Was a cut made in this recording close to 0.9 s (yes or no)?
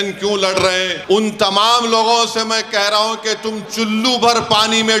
yes